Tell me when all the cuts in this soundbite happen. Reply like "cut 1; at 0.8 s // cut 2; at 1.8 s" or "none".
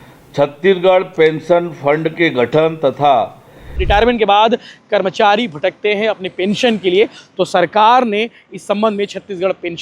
cut 1; at 3.7 s